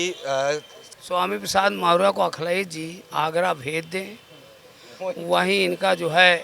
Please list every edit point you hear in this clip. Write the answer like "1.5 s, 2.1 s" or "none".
0.9 s